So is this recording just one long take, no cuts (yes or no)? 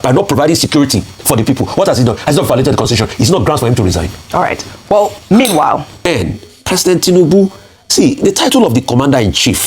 no